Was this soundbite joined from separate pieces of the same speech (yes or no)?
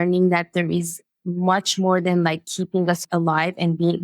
yes